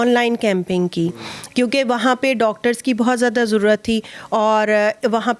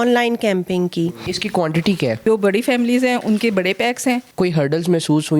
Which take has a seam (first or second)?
second